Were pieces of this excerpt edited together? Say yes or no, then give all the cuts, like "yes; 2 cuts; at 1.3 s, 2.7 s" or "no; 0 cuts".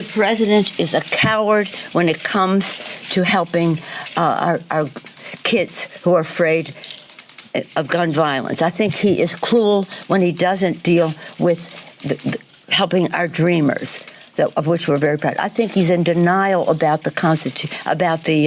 yes; 5 cuts; at 1.8 s, 8.5 s, 9.9 s, 15.4 s, 16.6 s